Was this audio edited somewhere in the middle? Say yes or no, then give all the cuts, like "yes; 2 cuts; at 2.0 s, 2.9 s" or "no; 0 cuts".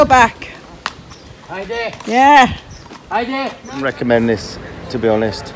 yes; 1 cut; at 4.0 s